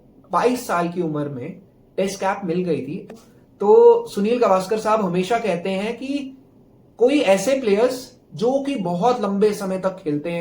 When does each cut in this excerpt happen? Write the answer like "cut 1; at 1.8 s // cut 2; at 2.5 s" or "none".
cut 1; at 3.1 s